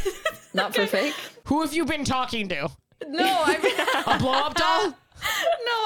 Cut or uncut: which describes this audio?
cut